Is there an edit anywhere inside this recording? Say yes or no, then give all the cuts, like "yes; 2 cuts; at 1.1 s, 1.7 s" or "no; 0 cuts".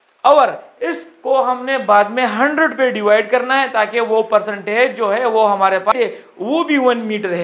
yes; 1 cut; at 5.9 s